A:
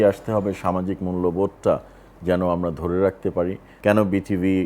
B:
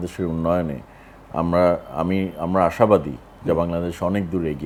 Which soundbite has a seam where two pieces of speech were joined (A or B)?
A